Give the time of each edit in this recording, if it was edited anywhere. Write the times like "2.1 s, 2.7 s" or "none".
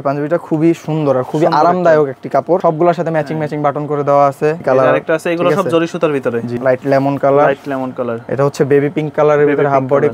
2.6 s, 4.6 s, 6.5 s, 8.2 s